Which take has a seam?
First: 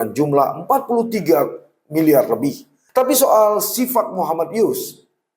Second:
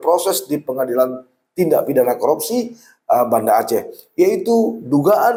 first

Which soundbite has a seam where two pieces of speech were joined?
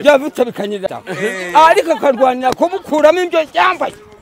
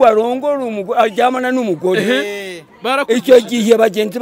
first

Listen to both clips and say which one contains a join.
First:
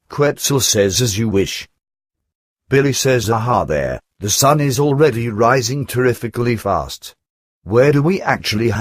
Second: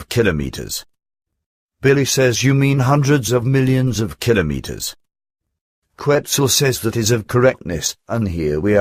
first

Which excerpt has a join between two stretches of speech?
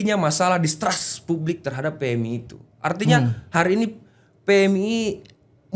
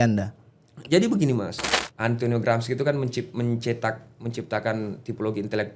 second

